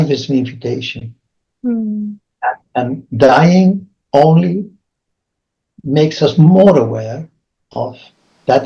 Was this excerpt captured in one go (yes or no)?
yes